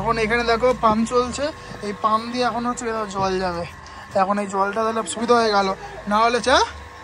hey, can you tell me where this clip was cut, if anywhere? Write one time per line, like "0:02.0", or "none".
none